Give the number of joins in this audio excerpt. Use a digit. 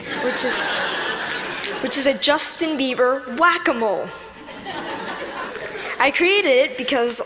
1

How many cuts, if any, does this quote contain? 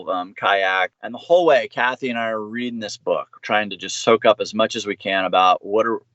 1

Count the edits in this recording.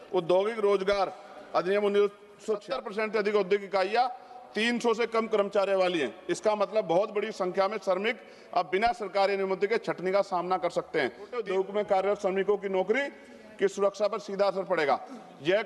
2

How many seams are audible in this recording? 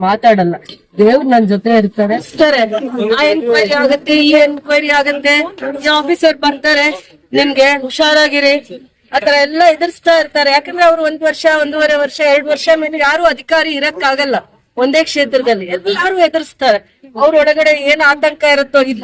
1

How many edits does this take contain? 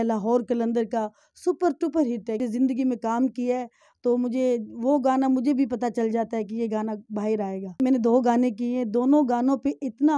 2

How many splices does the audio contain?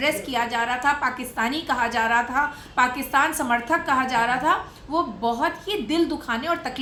0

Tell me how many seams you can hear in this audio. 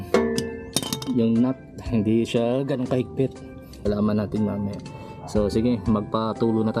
1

